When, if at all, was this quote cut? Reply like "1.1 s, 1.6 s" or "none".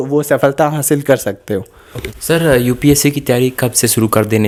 none